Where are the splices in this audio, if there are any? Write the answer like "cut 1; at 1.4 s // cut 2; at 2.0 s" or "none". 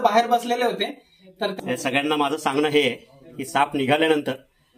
cut 1; at 1.5 s